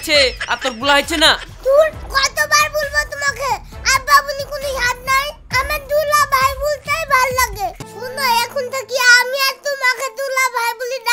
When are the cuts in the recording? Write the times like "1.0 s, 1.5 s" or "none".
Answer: 7.8 s